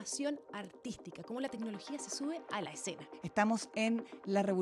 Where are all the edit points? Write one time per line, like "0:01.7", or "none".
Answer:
0:03.1